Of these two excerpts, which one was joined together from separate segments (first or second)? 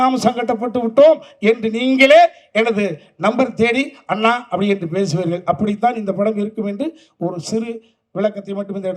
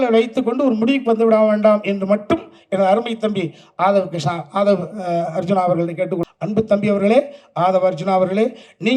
second